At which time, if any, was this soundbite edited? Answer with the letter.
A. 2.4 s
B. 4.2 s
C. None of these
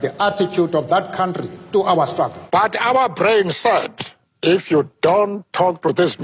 A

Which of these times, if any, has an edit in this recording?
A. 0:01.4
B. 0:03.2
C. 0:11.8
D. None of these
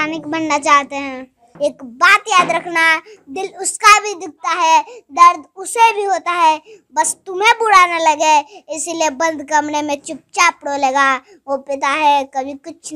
A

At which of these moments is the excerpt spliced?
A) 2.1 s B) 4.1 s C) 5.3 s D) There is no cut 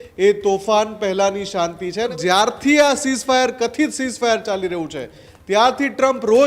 A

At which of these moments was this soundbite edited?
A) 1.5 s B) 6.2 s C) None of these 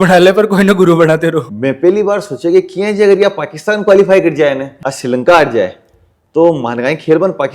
A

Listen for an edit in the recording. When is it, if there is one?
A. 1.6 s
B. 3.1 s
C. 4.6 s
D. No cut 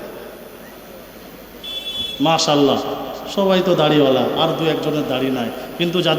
D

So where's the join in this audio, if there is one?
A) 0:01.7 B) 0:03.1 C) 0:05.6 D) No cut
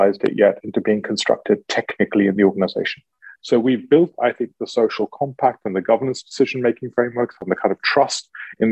B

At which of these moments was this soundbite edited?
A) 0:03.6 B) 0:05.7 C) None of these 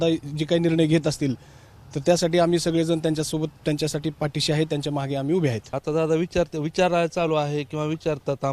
B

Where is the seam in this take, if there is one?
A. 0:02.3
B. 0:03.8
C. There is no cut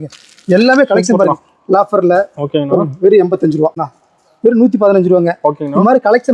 B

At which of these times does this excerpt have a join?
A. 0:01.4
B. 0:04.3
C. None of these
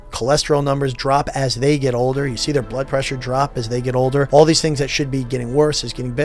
B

